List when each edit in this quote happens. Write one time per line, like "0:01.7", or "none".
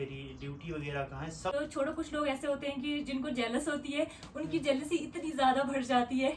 0:01.5